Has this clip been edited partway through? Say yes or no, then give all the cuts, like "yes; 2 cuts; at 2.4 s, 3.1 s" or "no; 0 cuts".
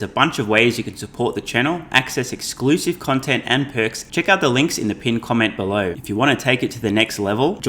yes; 2 cuts; at 4.0 s, 6.0 s